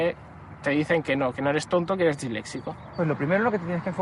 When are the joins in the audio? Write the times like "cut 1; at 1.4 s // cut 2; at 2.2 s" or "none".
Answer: cut 1; at 2.9 s